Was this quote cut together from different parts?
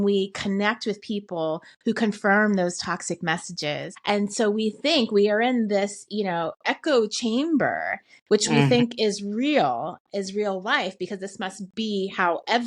yes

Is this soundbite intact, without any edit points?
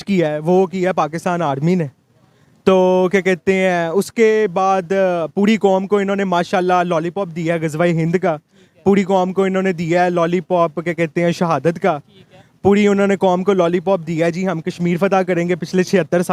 yes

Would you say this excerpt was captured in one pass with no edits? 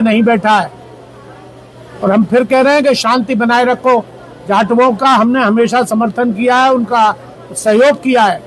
yes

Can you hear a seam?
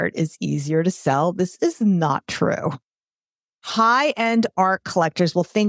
yes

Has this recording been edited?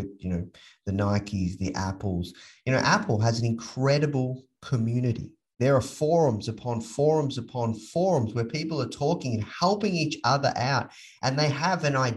no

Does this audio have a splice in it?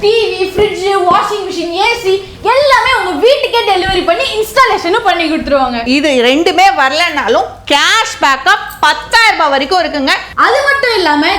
yes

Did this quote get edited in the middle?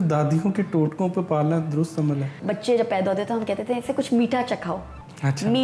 yes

